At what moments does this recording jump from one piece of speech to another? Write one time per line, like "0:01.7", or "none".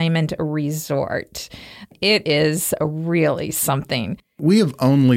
0:01.9
0:04.4